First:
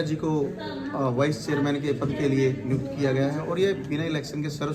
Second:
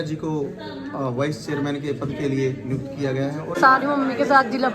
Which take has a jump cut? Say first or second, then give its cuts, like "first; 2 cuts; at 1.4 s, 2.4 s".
second; 1 cut; at 3.5 s